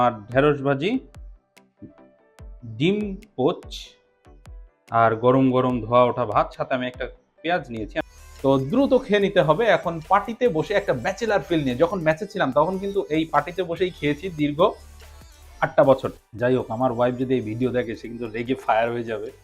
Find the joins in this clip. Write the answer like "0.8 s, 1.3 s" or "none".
7.9 s, 16.2 s